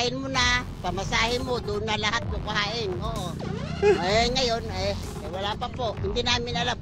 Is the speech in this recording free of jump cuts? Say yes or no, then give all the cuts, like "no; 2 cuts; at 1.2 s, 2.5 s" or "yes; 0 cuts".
yes; 0 cuts